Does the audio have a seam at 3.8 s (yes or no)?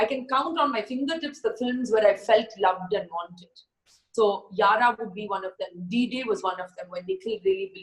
no